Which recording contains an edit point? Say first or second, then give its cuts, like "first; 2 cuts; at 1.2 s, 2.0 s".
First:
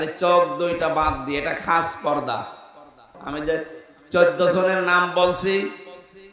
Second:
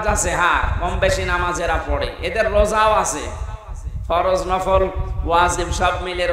first; 1 cut; at 3.2 s